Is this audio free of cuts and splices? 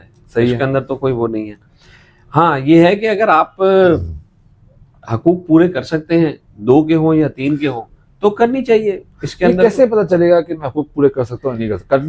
yes; 0 cuts

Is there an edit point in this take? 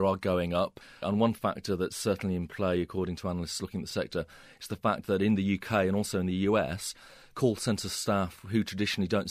yes; 1 cut; at 1.0 s

